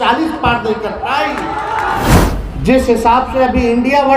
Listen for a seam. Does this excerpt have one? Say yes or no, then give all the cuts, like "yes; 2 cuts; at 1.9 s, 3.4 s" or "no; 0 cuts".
yes; 1 cut; at 2.1 s